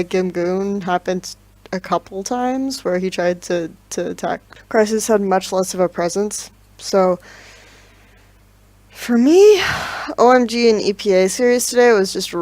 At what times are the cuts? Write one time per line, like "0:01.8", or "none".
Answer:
0:03.2